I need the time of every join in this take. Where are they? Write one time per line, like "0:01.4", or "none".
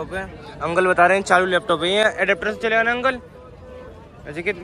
none